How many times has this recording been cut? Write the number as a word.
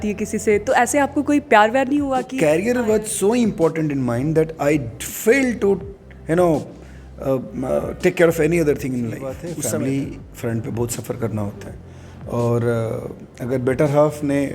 two